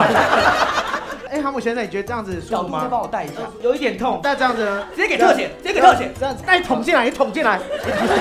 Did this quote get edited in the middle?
no; 0 cuts

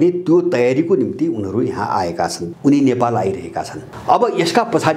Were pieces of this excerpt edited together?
yes; 2 cuts; at 2.4 s, 3.8 s

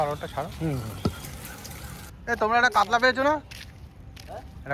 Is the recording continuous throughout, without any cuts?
no; 1 cut; at 2.0 s

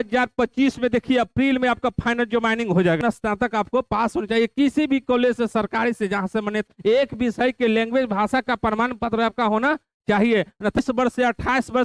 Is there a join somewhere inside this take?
yes; 3 cuts; at 3.0 s, 6.6 s, 10.8 s

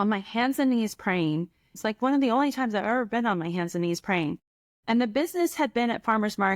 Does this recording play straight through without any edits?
no; 1 cut; at 1.7 s

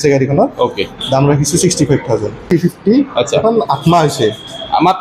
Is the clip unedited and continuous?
no; 1 cut; at 2.4 s

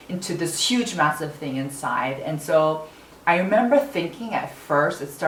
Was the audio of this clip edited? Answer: no; 0 cuts

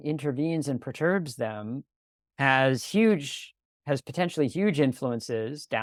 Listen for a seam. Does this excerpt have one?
no; 0 cuts

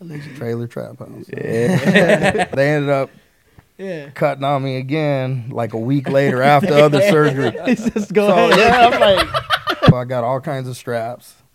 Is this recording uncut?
no; 2 cuts; at 2.5 s, 10.0 s

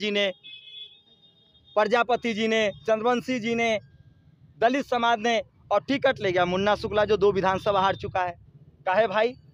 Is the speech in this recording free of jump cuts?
yes; 0 cuts

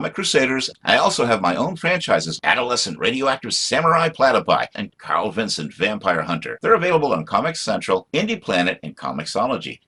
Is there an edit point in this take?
no; 0 cuts

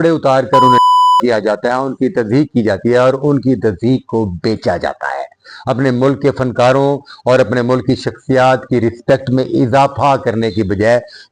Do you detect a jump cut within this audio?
no; 0 cuts

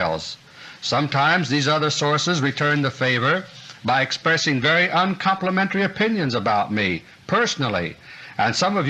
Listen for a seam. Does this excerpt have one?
yes; 1 cut; at 6.9 s

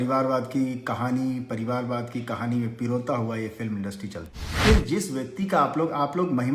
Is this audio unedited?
no; 1 cut; at 4.6 s

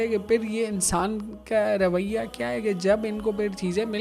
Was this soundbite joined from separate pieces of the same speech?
no; 0 cuts

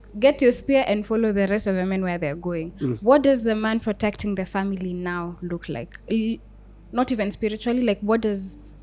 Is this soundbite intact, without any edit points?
yes; 0 cuts

